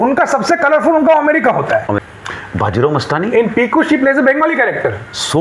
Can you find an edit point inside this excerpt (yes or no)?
yes